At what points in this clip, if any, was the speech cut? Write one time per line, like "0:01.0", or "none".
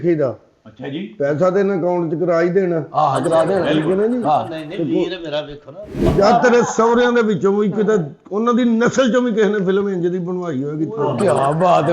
0:06.0